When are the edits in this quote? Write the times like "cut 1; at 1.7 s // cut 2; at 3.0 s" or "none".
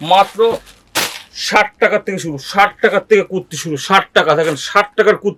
none